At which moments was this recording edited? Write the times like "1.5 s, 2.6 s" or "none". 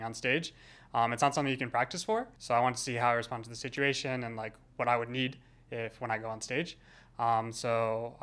2.3 s

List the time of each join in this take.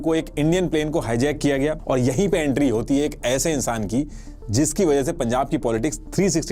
1.8 s

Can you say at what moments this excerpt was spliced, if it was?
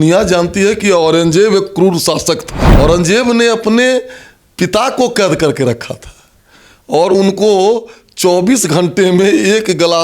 2.6 s

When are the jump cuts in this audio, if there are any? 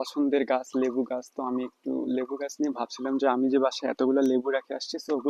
none

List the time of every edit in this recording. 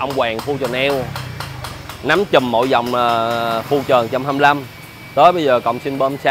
none

